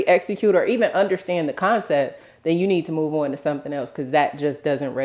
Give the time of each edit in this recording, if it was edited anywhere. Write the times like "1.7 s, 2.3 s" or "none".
none